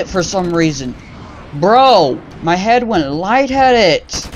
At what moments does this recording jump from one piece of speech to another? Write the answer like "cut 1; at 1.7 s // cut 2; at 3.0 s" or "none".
cut 1; at 2.3 s